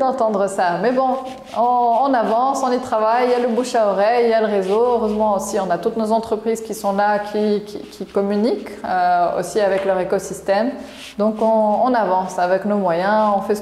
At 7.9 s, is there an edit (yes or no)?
no